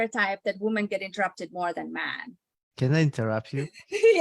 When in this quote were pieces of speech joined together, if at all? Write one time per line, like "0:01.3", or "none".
0:02.7